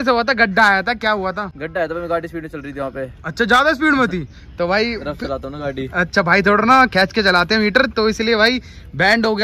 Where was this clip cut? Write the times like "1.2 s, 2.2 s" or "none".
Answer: none